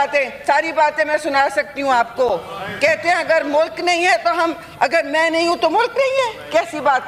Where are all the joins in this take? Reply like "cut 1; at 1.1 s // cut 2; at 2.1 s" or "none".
none